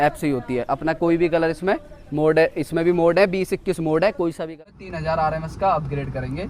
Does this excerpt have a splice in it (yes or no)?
yes